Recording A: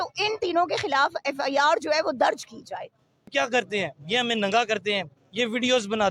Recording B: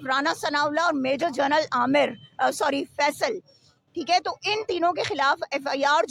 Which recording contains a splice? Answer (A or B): A